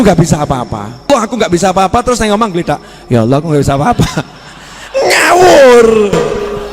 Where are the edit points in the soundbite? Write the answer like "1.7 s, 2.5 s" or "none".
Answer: 1.1 s